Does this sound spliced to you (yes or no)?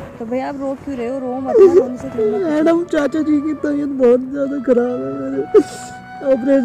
no